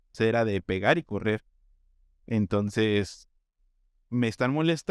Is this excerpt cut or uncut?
uncut